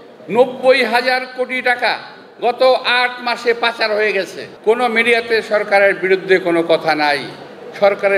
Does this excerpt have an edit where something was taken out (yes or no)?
yes